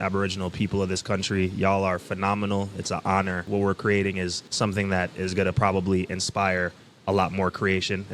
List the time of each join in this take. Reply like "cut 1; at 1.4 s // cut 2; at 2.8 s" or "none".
cut 1; at 3.5 s // cut 2; at 4.4 s